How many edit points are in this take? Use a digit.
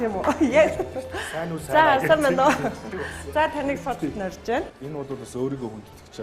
1